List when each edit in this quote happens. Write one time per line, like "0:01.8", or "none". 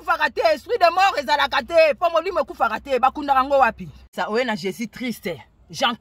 0:04.0